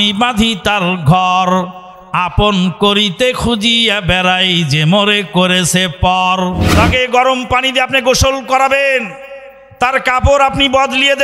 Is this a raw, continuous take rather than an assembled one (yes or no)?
no